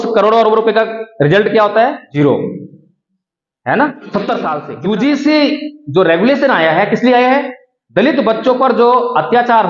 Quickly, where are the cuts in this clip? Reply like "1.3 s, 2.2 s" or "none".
2.1 s, 4.6 s